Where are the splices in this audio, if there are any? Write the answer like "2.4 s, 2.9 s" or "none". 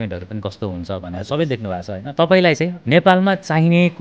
2.0 s, 2.8 s

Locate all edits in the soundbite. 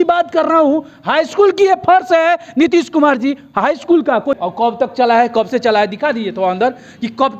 4.3 s

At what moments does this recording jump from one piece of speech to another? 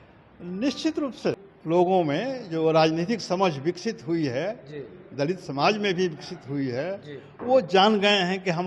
1.5 s

